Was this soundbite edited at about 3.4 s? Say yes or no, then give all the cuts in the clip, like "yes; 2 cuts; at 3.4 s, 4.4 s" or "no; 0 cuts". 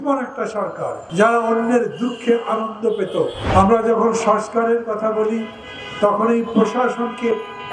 yes; 2 cuts; at 1.0 s, 3.4 s